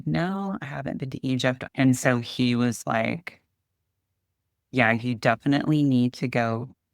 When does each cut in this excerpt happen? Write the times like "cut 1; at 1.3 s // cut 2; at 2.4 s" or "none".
cut 1; at 1.6 s

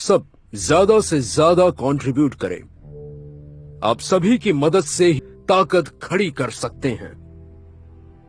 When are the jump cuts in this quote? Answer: cut 1; at 5.3 s

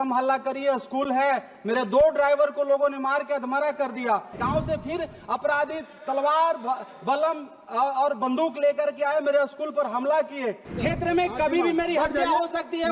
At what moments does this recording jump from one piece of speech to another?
cut 1; at 4.3 s // cut 2; at 10.7 s

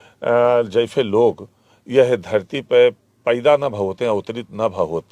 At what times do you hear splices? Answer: none

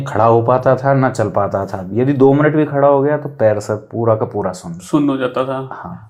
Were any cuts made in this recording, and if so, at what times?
none

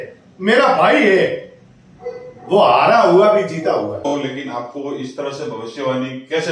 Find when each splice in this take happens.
cut 1; at 4.1 s

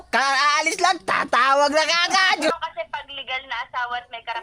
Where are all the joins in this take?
cut 1; at 2.5 s

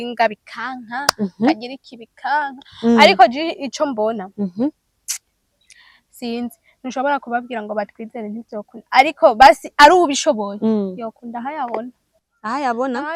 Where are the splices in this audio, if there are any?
none

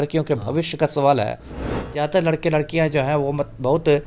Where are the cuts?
cut 1; at 1.7 s

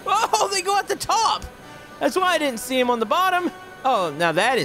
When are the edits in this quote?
cut 1; at 3.7 s

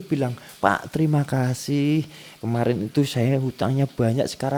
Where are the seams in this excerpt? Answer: none

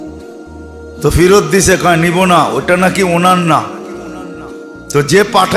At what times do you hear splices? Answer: cut 1; at 1.0 s

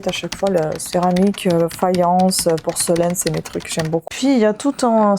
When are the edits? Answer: cut 1; at 4.1 s

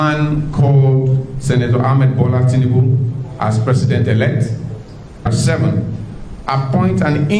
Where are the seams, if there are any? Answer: cut 1; at 5.3 s

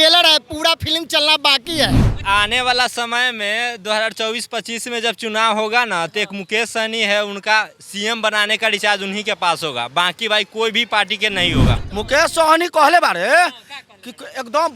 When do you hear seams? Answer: cut 1; at 2.1 s // cut 2; at 11.8 s

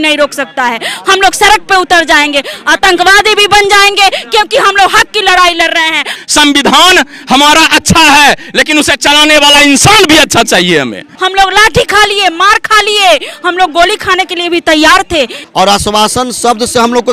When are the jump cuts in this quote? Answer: cut 1; at 6.2 s // cut 2; at 11.0 s // cut 3; at 15.4 s

